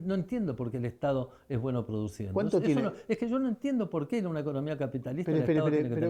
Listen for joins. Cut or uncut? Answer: uncut